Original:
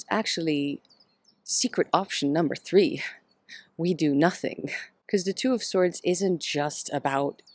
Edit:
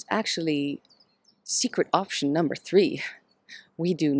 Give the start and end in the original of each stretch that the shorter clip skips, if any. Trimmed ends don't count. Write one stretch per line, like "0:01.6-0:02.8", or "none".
none